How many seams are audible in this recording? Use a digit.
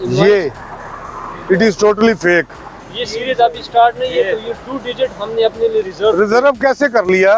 1